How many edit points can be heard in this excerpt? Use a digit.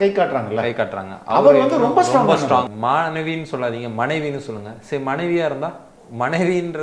1